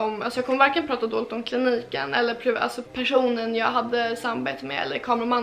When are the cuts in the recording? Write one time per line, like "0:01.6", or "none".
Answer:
none